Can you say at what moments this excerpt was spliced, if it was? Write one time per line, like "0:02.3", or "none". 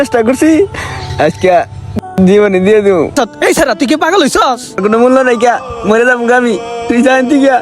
0:03.1
0:04.8